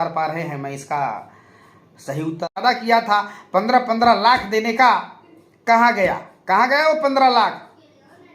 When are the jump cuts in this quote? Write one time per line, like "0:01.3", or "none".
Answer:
0:02.6